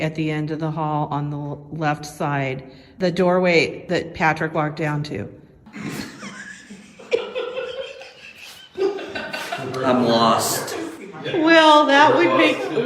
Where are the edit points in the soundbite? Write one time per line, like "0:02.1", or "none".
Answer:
0:02.9
0:03.8
0:05.6